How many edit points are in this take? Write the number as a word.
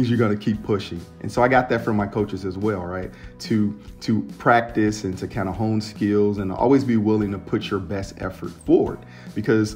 one